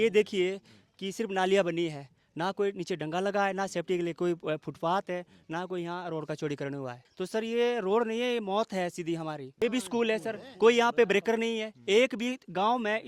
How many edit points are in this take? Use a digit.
2